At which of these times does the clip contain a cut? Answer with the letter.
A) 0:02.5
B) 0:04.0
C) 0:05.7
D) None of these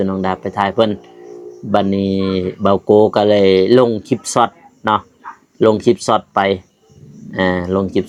D